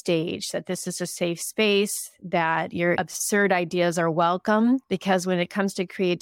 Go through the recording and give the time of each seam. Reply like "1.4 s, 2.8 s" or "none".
3.0 s